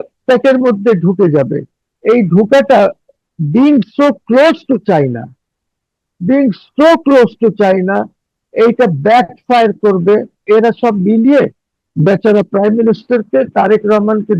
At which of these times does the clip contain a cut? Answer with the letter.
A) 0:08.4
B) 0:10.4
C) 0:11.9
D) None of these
B